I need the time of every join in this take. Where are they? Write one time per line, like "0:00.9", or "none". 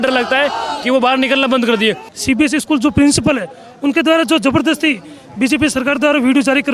0:02.1